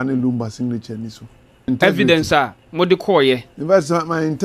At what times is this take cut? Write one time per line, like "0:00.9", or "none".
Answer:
0:01.7